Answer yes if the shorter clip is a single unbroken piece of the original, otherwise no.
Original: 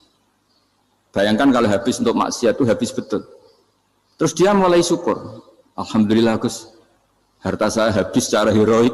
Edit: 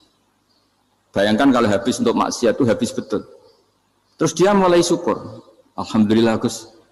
yes